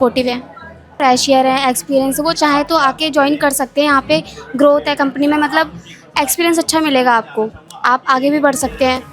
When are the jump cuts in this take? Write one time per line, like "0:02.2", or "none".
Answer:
0:01.0